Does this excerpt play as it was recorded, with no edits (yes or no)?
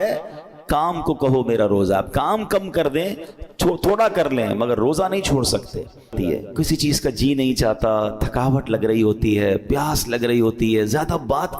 no